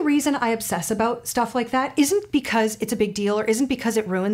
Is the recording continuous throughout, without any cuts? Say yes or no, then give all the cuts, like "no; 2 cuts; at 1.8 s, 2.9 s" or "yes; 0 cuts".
yes; 0 cuts